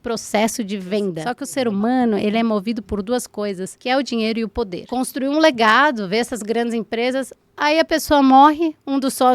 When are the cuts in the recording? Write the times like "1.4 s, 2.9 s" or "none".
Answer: 1.3 s, 3.7 s, 4.8 s